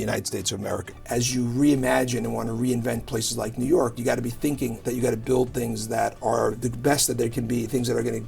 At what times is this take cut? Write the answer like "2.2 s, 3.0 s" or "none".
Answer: 0.9 s, 4.8 s